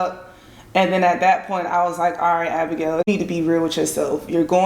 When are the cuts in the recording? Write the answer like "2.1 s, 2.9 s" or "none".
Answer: 3.1 s